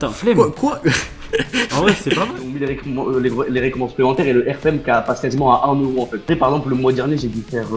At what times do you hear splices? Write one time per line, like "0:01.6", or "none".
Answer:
0:02.3
0:06.2